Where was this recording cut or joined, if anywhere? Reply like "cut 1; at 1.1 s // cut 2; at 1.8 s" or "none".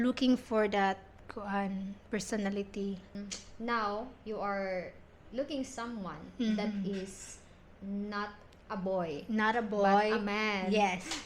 cut 1; at 3.1 s

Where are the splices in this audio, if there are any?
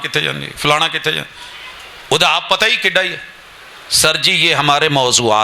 none

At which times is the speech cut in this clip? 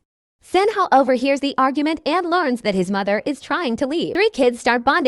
cut 1; at 4.1 s

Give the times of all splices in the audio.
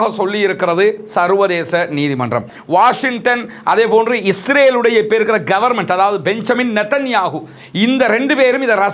cut 1; at 2.5 s

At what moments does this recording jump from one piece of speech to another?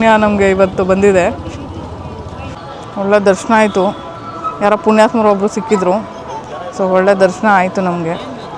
cut 1; at 2.5 s

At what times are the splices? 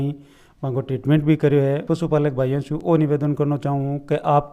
cut 1; at 1.8 s

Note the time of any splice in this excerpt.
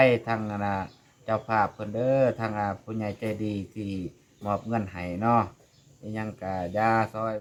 none

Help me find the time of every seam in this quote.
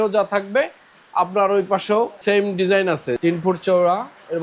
cut 1; at 2.2 s // cut 2; at 3.2 s

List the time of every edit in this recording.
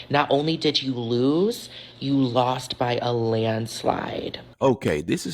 cut 1; at 4.4 s

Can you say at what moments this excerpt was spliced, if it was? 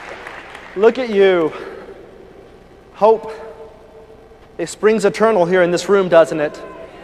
none

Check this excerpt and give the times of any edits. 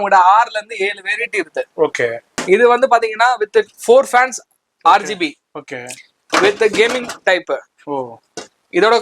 cut 1; at 2.3 s

